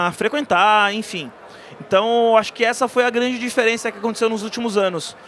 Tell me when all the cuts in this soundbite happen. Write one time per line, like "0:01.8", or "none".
none